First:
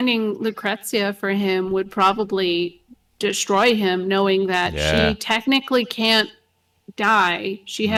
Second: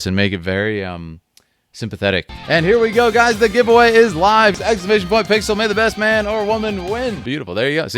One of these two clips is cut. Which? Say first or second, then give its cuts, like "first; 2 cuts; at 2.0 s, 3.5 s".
second; 3 cuts; at 2.3 s, 4.6 s, 7.2 s